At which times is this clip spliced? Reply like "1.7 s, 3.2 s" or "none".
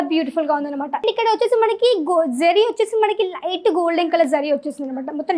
1.0 s